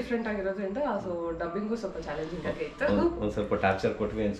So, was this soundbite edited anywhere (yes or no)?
no